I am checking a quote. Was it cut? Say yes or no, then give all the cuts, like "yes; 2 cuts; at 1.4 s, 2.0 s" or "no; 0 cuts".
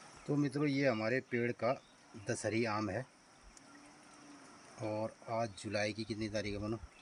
no; 0 cuts